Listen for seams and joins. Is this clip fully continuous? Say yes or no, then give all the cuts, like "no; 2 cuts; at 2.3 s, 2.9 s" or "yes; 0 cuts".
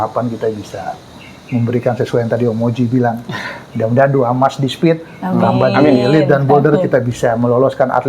yes; 0 cuts